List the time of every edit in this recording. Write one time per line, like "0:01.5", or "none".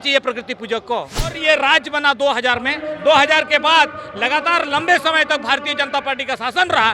0:01.4